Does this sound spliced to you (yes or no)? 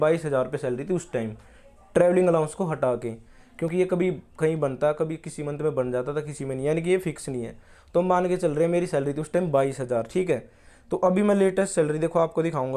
no